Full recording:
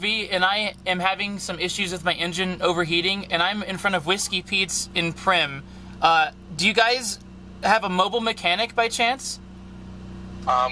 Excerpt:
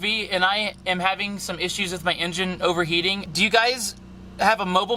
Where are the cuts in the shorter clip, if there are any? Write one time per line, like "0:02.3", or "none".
0:03.2